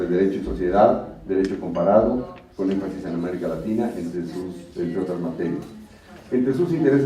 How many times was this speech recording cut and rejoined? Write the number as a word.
one